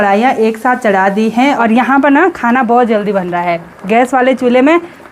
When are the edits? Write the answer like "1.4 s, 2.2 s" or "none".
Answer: 1.6 s